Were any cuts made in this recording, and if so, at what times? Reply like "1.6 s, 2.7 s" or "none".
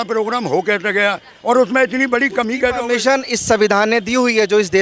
none